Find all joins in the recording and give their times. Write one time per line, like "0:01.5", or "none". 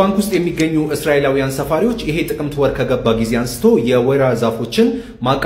none